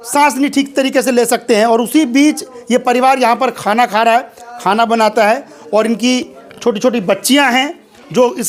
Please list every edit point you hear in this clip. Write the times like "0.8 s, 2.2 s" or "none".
none